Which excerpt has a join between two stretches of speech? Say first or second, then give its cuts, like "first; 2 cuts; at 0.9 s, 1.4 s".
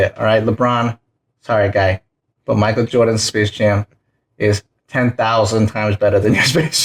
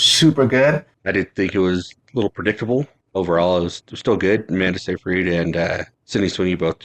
second; 3 cuts; at 0.9 s, 3.0 s, 5.9 s